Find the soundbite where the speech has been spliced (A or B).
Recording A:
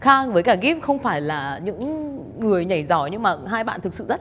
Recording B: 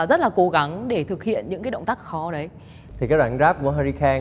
B